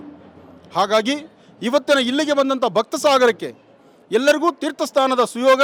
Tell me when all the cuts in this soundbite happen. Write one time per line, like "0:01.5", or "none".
none